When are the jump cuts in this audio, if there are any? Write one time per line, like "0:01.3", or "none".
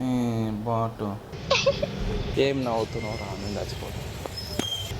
0:01.3
0:02.3